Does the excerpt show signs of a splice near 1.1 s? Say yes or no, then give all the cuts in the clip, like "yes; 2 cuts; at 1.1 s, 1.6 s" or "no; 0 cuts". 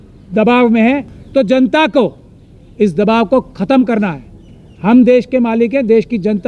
yes; 1 cut; at 1.1 s